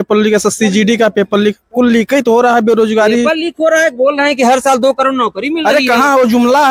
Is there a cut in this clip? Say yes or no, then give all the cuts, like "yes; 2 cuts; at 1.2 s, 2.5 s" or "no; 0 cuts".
no; 0 cuts